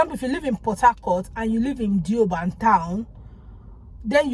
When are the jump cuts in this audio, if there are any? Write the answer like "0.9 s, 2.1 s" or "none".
none